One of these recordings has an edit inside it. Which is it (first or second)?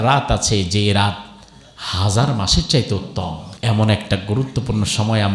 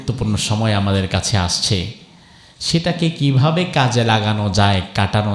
first